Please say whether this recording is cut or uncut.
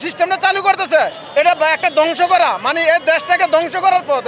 uncut